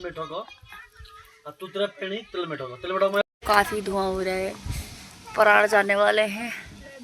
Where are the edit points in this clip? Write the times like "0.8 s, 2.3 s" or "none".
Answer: 3.2 s